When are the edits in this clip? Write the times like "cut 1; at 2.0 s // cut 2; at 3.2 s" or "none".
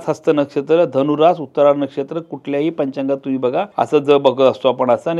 cut 1; at 3.7 s

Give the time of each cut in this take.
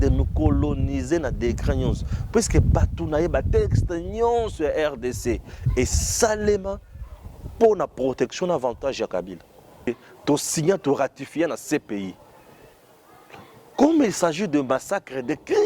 cut 1; at 9.9 s

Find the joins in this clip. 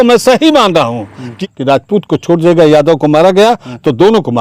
cut 1; at 1.3 s

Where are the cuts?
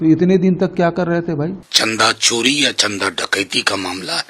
cut 1; at 1.7 s

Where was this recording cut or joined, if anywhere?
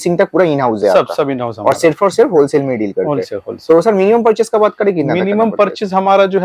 none

